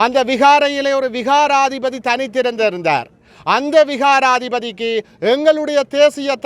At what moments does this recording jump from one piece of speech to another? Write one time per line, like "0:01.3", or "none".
none